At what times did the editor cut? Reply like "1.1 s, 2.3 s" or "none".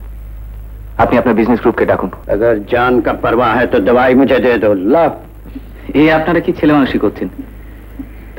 2.1 s

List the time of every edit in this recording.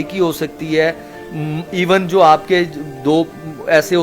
none

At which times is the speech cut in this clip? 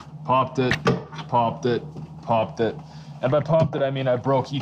none

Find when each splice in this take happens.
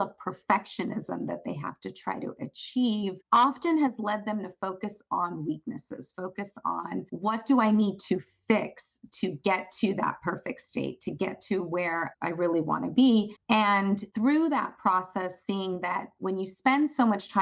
3.2 s, 7.1 s

